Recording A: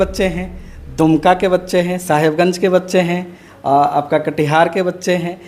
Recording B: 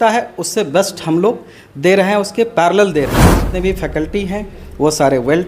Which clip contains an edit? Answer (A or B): B